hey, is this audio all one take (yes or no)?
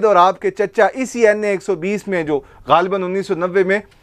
yes